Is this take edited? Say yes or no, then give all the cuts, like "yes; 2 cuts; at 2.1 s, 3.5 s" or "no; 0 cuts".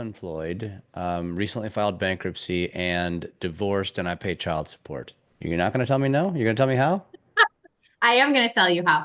yes; 1 cut; at 5.2 s